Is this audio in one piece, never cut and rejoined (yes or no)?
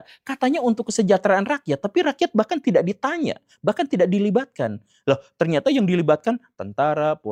yes